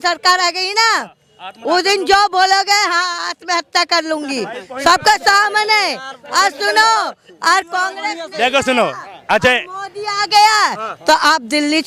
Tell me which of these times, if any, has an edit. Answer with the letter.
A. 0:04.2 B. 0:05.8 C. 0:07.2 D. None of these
D